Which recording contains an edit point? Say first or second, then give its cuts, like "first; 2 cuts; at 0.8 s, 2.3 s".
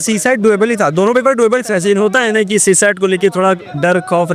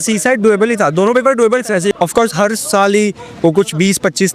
second; 1 cut; at 1.9 s